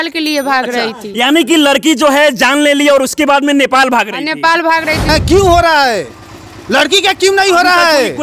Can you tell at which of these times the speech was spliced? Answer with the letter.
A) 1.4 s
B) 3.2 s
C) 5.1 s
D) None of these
C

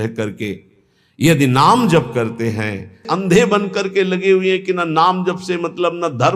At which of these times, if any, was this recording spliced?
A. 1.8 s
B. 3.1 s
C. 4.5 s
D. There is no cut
B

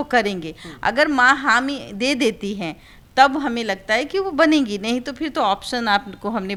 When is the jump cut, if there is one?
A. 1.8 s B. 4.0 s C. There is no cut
C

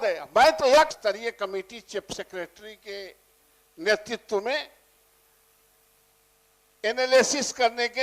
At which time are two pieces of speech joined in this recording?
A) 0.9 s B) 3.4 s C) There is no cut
A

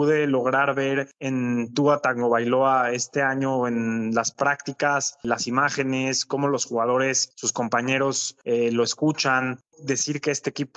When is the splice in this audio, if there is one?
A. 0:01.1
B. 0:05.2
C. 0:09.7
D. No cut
C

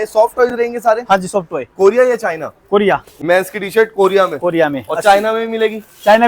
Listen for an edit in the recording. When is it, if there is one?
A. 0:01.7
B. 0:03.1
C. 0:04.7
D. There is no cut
B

